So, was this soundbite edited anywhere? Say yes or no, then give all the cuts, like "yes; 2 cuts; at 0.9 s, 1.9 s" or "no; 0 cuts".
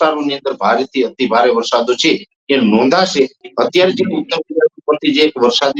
yes; 1 cut; at 3.4 s